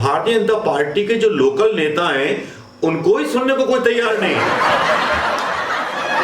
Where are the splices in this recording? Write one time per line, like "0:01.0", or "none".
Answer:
0:04.4